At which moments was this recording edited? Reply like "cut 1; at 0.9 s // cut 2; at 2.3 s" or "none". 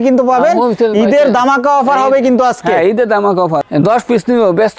cut 1; at 3.7 s